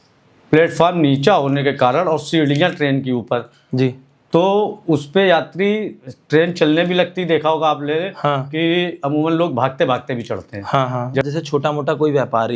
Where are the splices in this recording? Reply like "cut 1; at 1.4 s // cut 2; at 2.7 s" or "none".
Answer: cut 1; at 11.3 s